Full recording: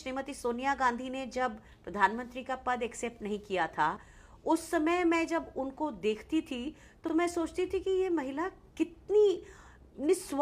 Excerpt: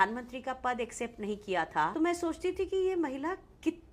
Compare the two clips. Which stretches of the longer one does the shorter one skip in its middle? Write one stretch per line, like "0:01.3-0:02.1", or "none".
0:04.0-0:07.1